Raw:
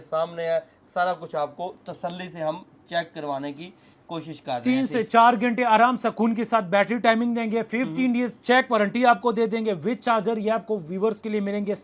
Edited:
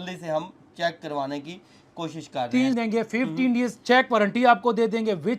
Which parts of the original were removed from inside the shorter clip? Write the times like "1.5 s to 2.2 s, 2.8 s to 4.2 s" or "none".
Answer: 4.9 s to 7.4 s